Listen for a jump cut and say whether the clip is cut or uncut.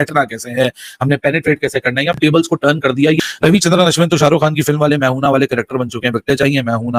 uncut